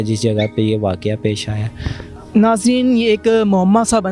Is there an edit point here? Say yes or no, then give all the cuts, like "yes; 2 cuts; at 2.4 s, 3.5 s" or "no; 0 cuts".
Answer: no; 0 cuts